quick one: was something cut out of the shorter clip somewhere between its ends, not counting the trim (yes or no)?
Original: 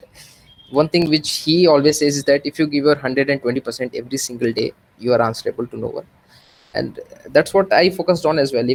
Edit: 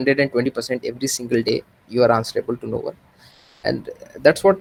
no